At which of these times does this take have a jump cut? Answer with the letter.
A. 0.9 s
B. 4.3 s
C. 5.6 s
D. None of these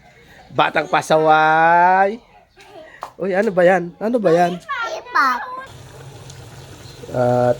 C